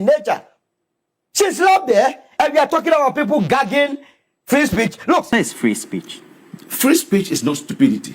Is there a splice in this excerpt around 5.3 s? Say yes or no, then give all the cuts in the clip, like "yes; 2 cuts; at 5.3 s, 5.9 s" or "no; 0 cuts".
yes; 1 cut; at 5.3 s